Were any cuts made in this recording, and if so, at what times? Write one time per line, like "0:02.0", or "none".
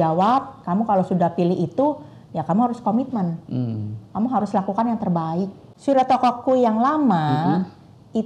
0:05.7